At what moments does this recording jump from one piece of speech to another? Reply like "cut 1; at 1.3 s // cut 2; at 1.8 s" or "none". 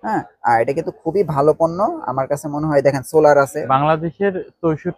cut 1; at 3.6 s